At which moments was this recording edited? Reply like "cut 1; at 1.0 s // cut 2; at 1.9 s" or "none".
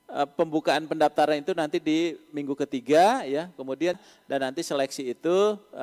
cut 1; at 4.0 s